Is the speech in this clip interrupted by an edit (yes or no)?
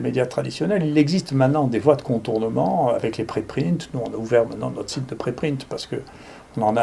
no